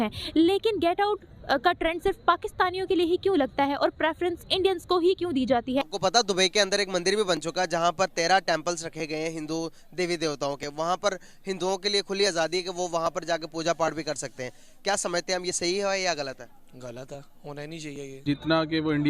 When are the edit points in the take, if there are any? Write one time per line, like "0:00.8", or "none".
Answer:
0:05.9
0:18.2